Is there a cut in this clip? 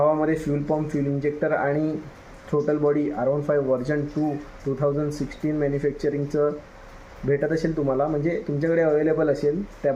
no; 0 cuts

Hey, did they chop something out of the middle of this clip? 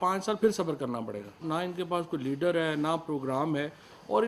yes; 1 cut; at 1.4 s

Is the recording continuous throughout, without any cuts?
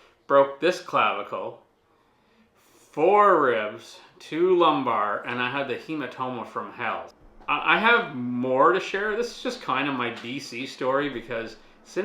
no; 1 cut; at 7.1 s

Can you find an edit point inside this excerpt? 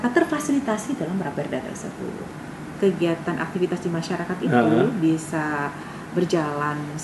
yes; 1 cut; at 2.2 s

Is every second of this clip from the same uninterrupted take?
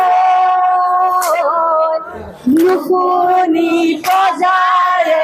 yes; 0 cuts

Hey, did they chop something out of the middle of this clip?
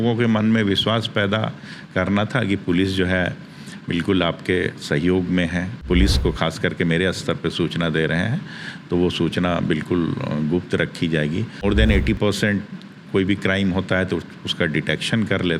yes; 2 cuts; at 5.8 s, 11.6 s

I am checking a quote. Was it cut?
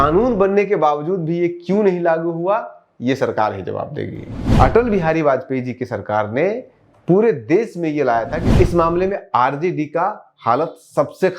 yes; 2 cuts; at 4.4 s, 8.4 s

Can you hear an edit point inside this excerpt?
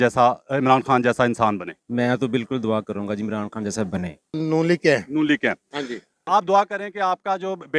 yes; 2 cuts; at 4.3 s, 6.3 s

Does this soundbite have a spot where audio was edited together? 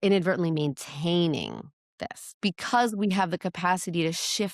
yes; 1 cut; at 2.3 s

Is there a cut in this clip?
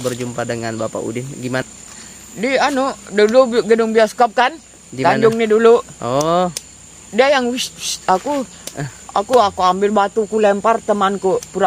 yes; 1 cut; at 1.7 s

